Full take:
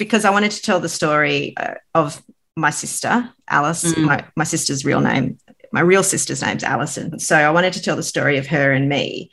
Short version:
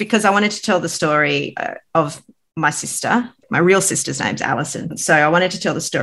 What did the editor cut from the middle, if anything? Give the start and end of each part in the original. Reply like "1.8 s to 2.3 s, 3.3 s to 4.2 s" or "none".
3.4 s to 5.6 s